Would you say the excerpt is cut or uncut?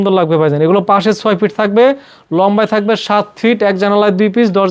uncut